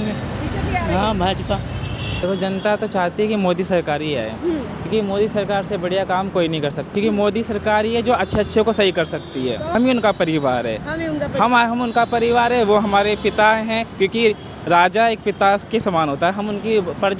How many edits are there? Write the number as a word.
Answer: three